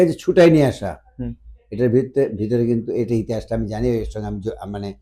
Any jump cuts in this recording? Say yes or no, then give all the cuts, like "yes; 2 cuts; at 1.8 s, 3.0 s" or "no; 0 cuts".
no; 0 cuts